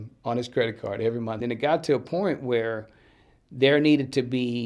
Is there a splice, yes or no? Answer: yes